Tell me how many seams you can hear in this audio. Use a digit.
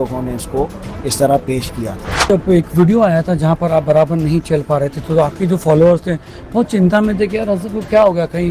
1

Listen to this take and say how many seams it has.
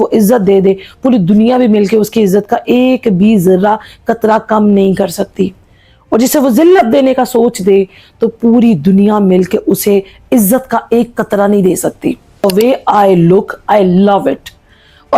1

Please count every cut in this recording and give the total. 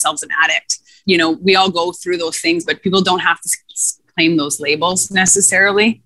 1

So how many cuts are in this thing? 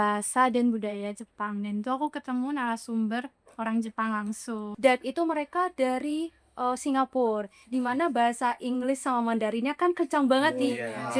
1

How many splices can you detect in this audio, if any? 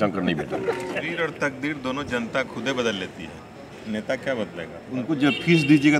2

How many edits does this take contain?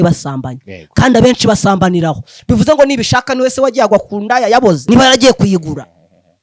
1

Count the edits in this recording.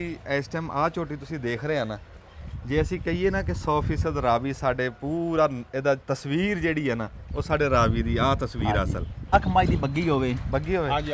1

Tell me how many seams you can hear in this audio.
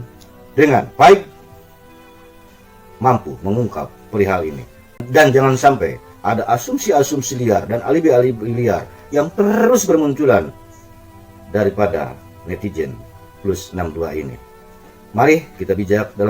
1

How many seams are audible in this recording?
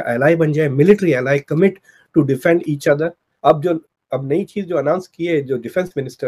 1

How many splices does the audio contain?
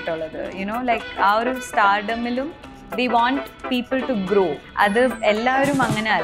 1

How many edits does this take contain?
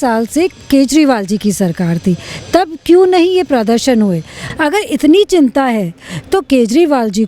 1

